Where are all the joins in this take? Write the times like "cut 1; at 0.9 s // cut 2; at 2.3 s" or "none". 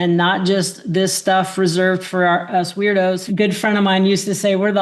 cut 1; at 3.2 s